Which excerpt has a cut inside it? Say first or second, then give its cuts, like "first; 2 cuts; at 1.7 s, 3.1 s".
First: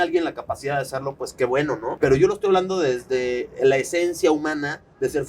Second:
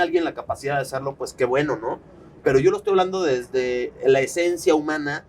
first; 1 cut; at 1.9 s